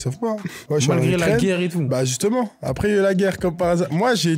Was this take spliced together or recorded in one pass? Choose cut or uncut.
uncut